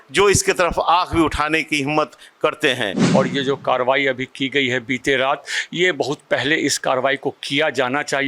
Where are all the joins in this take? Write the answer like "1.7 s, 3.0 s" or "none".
3.0 s